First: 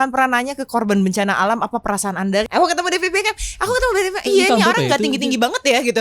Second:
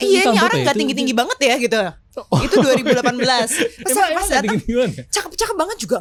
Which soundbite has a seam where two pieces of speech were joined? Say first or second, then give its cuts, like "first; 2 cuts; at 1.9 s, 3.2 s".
first; 1 cut; at 2.5 s